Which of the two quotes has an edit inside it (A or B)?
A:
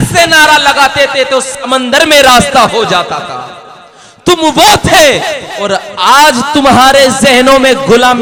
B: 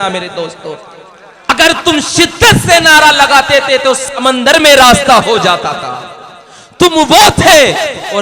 B